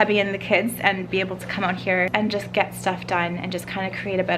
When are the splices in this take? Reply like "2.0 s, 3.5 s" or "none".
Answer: 2.1 s